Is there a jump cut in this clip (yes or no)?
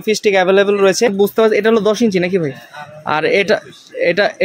yes